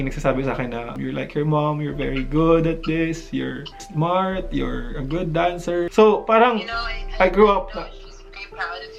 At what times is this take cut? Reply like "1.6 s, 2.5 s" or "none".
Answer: none